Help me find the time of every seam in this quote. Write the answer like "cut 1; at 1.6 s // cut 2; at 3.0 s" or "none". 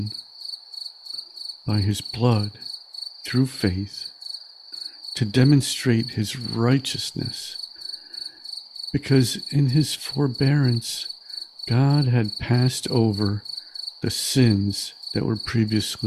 none